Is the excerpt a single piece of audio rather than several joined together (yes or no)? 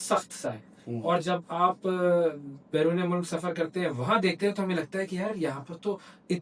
yes